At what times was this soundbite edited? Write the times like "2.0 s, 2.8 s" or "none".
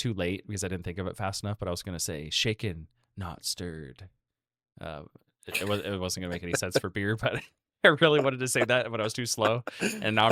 none